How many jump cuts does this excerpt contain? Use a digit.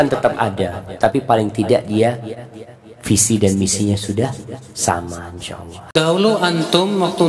1